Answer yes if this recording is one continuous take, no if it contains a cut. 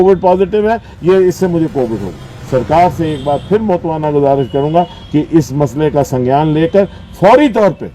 no